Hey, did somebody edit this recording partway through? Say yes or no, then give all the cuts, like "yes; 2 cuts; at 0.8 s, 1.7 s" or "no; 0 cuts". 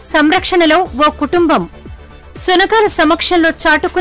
no; 0 cuts